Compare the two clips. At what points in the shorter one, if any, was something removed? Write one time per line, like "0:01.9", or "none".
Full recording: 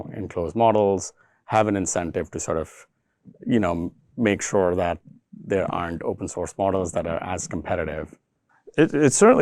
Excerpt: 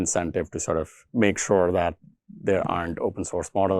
0:01.0